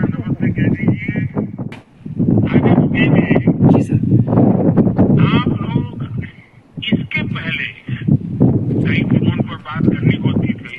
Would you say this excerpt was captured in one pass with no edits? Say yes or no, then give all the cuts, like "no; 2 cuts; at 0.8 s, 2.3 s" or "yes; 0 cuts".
no; 1 cut; at 1.6 s